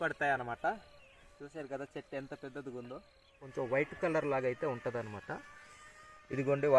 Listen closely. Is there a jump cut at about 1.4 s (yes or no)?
no